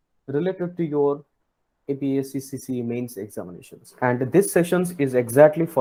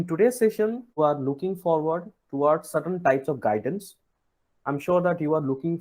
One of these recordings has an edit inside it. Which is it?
second; 1 cut; at 1.0 s

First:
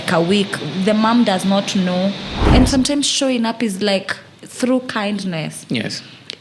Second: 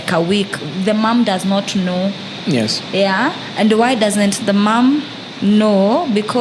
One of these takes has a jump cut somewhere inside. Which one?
first; 1 cut; at 2.4 s

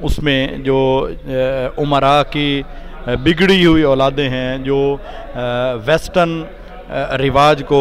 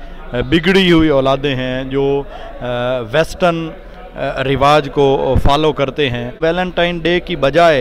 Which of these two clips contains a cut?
second; 1 cut; at 6.4 s

